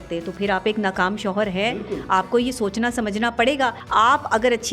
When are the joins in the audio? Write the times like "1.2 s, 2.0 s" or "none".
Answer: 3.8 s